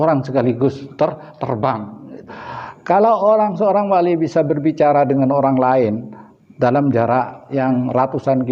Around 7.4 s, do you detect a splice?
yes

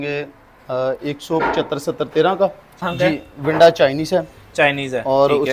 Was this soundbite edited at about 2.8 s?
yes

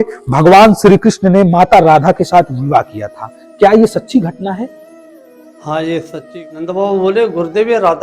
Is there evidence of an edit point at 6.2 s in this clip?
yes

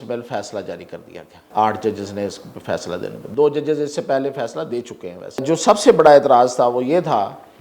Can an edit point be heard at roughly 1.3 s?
yes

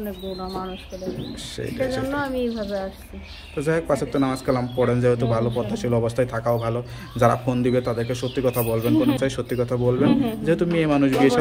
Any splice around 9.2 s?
yes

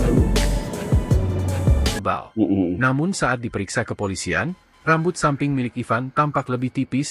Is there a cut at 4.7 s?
no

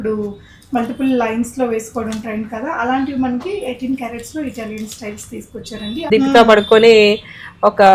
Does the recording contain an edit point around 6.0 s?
yes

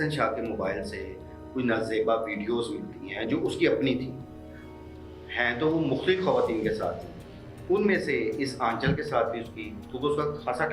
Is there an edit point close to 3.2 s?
no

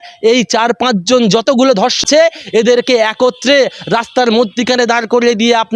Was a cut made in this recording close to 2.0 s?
yes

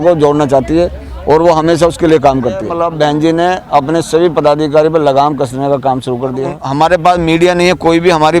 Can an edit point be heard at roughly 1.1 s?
no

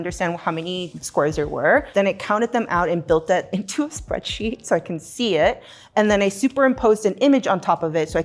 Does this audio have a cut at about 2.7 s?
no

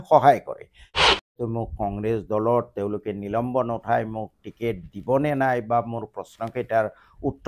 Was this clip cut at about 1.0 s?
yes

